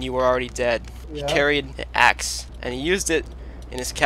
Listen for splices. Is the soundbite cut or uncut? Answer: cut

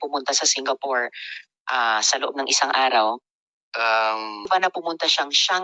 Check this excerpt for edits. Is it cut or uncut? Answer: cut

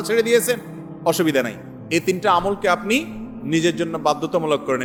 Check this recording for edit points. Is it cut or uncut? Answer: uncut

